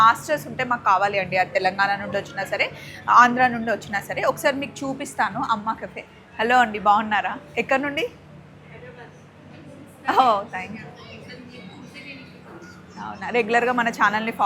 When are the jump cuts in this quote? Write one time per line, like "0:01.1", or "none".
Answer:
none